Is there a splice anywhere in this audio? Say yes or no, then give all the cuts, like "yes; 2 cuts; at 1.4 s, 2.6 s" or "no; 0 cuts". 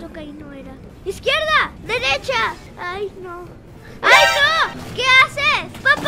no; 0 cuts